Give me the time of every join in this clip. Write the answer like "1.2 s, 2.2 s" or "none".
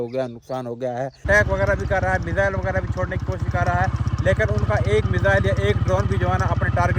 1.2 s